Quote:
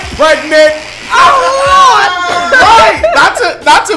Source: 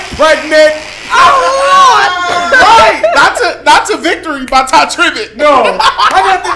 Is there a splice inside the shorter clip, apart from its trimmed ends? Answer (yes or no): no